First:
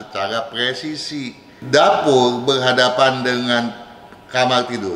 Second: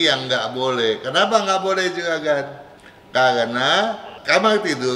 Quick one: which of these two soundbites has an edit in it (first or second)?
first